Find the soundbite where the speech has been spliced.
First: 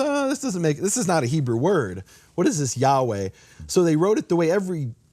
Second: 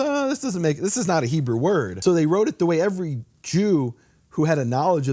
second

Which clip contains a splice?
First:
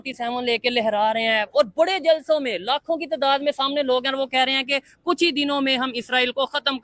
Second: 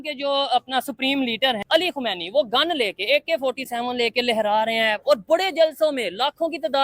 second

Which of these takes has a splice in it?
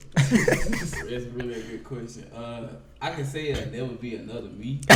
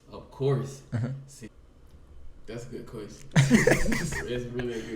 second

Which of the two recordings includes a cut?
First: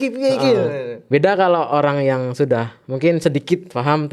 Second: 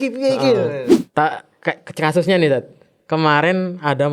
second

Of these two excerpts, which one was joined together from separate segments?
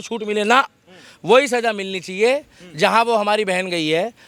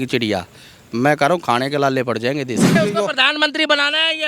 second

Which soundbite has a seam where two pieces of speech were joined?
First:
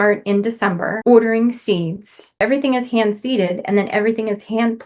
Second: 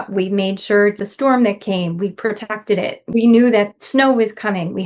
first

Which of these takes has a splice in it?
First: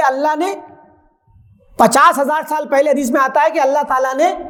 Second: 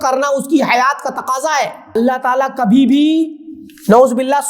second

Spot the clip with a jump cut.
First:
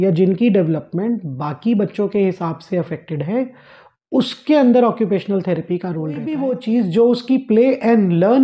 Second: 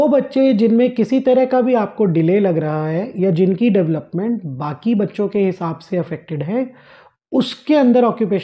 first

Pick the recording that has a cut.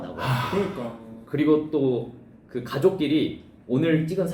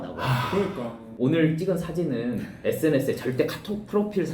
second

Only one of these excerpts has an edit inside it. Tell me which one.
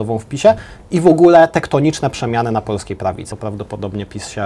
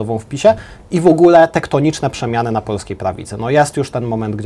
first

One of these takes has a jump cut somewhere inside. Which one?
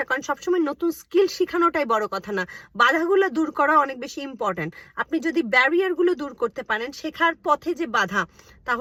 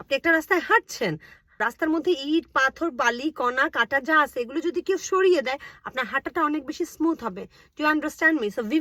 second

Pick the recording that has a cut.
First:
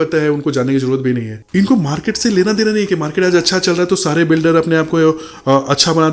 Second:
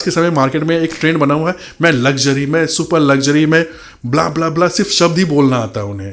first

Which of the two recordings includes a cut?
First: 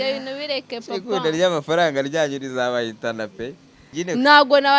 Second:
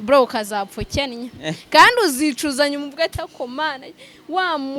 first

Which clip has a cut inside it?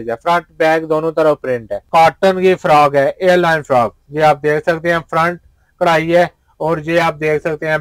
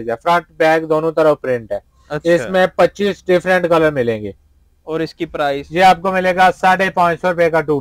first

